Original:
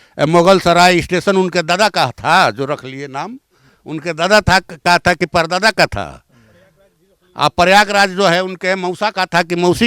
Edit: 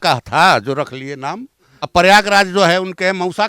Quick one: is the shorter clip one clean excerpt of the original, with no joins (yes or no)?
no